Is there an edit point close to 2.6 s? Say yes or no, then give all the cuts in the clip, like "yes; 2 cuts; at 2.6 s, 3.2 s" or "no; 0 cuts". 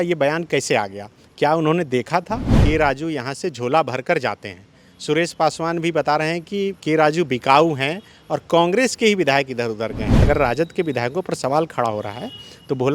yes; 2 cuts; at 2.6 s, 10.1 s